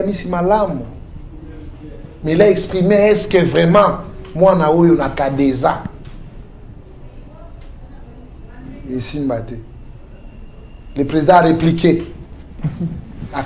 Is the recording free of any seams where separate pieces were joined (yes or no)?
yes